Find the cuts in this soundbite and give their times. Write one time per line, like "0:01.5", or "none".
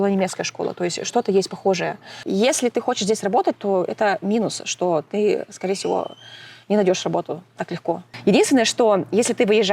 0:02.2
0:08.1